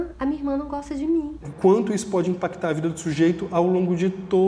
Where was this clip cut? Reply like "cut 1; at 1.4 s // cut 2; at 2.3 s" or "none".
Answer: cut 1; at 1.4 s